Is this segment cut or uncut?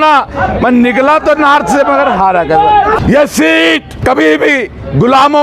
cut